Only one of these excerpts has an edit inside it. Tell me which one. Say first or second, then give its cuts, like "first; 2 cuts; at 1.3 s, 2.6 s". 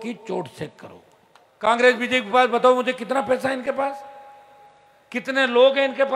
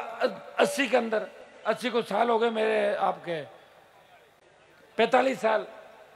first; 1 cut; at 1.7 s